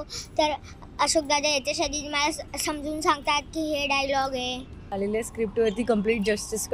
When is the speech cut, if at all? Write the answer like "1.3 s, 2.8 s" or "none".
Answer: 4.8 s